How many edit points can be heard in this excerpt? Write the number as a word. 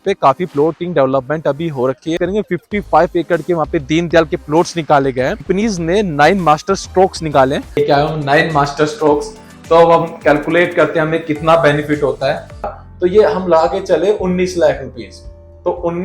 four